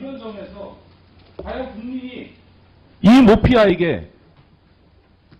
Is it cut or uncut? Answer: cut